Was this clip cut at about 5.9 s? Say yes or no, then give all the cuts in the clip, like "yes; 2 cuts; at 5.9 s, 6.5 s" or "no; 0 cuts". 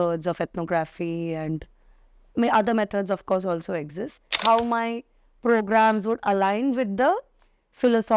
no; 1 cut; at 4.3 s